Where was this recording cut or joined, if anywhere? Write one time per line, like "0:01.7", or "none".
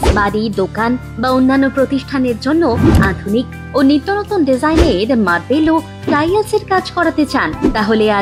none